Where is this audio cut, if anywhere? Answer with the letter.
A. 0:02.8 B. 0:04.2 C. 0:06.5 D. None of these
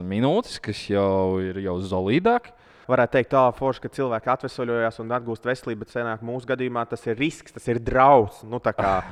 A